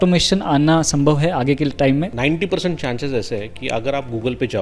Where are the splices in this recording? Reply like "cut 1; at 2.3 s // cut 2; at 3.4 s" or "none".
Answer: cut 1; at 2.1 s